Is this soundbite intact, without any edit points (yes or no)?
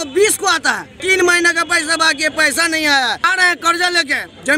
no